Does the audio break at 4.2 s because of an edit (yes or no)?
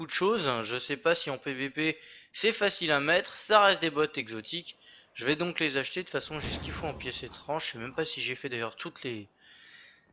no